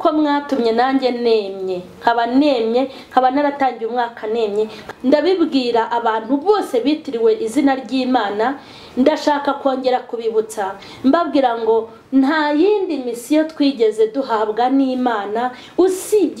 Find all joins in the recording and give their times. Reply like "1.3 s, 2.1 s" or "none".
4.8 s